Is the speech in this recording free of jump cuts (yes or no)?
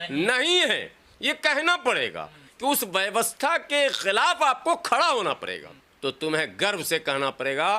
no